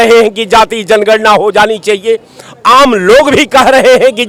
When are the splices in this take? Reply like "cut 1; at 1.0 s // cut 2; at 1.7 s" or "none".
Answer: none

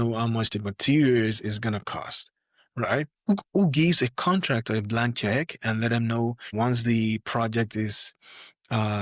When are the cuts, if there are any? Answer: cut 1; at 3.1 s // cut 2; at 6.5 s

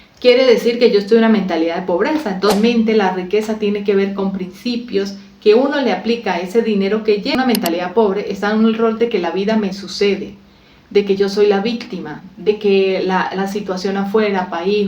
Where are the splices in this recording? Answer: cut 1; at 2.5 s // cut 2; at 7.3 s

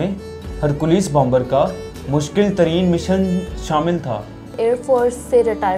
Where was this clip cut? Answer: cut 1; at 4.6 s

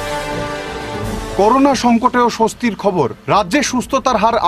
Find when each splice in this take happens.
none

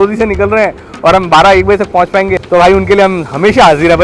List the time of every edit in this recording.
none

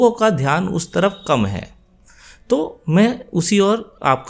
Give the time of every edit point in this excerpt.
none

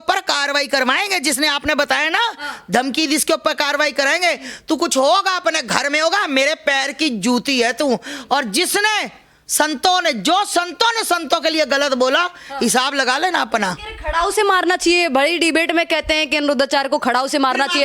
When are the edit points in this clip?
none

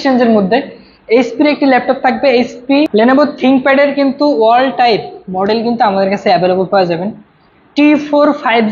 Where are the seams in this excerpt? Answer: cut 1; at 2.9 s

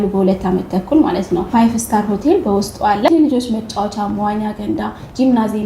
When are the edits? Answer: cut 1; at 1.5 s // cut 2; at 3.1 s

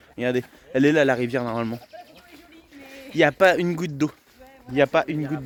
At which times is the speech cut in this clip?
none

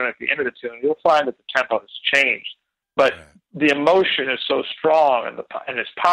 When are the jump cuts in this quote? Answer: none

